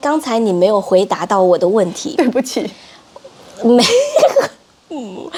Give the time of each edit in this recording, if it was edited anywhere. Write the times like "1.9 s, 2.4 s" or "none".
none